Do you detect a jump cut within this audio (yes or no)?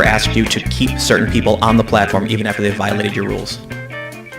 yes